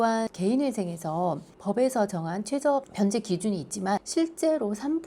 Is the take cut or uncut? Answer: cut